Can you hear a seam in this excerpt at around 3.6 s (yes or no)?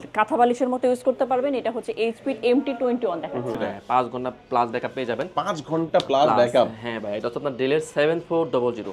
yes